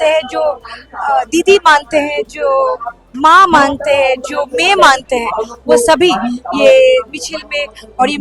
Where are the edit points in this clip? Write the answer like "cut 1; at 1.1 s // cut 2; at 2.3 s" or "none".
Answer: none